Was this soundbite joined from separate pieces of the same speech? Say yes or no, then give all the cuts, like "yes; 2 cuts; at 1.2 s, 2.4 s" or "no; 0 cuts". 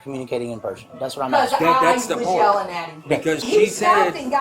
yes; 1 cut; at 3.4 s